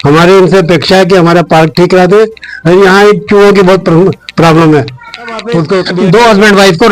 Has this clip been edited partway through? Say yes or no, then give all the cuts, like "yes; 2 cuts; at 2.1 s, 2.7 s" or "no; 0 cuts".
yes; 1 cut; at 5.9 s